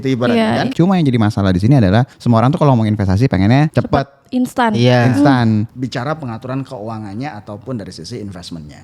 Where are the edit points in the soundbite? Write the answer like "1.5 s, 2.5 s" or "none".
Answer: 0.7 s, 2.1 s, 3.7 s, 5.7 s